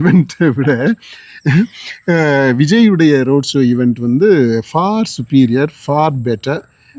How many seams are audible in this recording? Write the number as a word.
zero